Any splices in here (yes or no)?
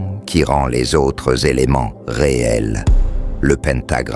yes